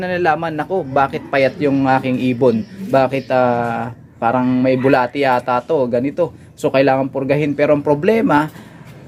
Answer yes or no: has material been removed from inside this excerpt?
no